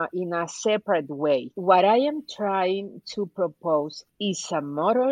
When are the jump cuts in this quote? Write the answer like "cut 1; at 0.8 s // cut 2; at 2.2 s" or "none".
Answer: cut 1; at 1.5 s // cut 2; at 4.0 s

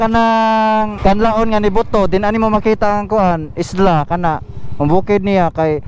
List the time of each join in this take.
cut 1; at 0.9 s

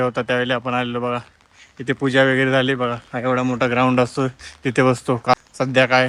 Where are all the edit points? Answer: none

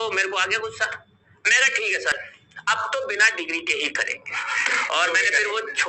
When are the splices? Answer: cut 1; at 2.1 s

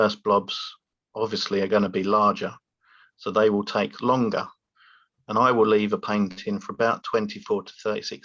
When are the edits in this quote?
none

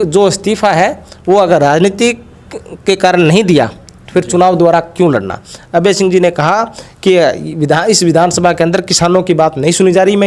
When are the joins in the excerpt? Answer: none

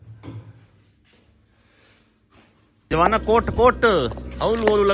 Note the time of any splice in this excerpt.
cut 1; at 2.7 s

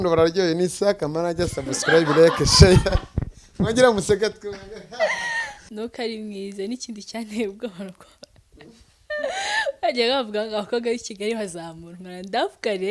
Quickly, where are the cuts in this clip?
cut 1; at 5.7 s

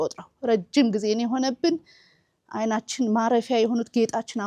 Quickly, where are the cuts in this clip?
none

